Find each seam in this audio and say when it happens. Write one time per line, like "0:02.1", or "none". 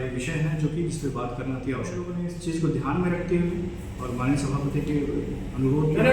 0:02.1